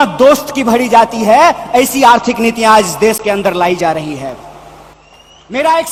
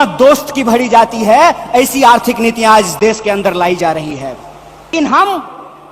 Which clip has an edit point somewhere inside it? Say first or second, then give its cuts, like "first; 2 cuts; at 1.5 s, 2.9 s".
second; 1 cut; at 4.9 s